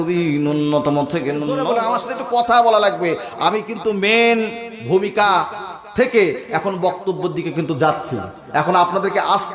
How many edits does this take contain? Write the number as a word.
one